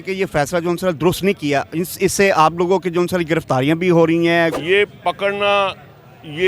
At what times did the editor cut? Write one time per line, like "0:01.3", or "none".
0:04.5